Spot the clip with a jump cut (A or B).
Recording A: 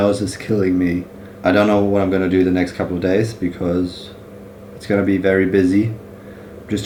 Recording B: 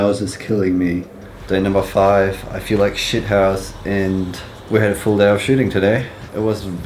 B